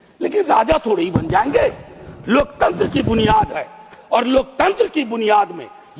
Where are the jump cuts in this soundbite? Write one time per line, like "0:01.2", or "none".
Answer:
none